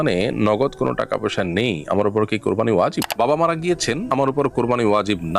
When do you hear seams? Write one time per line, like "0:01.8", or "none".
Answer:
0:03.1